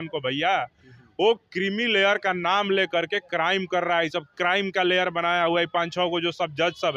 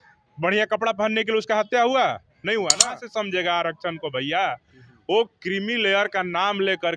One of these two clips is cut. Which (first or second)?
second